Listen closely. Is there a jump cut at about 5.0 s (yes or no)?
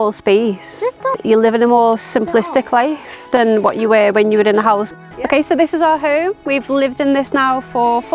yes